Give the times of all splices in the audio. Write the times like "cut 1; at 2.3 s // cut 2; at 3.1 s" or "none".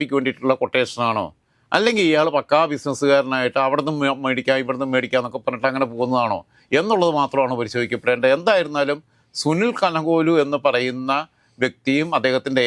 none